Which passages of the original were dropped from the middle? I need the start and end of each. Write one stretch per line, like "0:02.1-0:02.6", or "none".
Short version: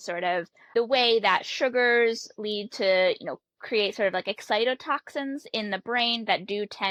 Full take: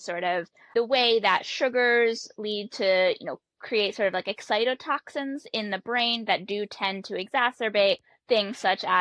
none